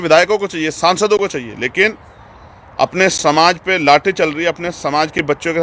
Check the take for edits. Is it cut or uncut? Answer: uncut